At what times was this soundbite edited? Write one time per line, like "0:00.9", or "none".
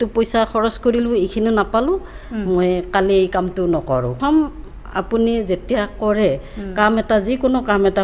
0:04.2